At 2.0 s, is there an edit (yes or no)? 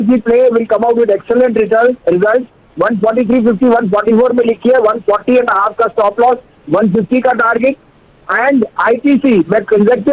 no